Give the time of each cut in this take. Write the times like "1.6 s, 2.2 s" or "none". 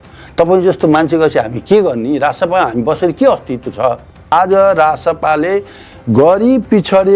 4.3 s

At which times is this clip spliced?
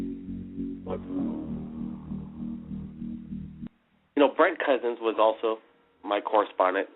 3.6 s

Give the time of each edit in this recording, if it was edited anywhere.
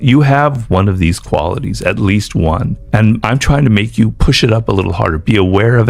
3.1 s, 4.2 s

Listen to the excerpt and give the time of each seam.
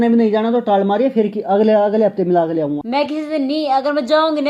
2.8 s

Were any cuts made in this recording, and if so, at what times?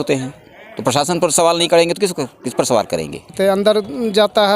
3.3 s

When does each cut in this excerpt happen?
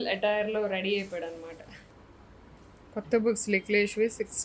2.0 s

